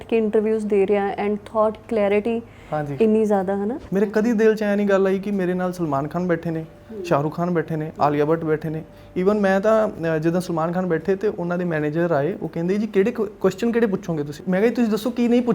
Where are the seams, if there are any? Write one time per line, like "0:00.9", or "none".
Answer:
0:03.8
0:14.4